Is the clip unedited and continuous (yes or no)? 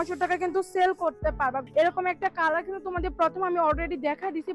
no